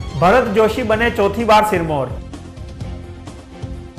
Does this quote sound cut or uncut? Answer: cut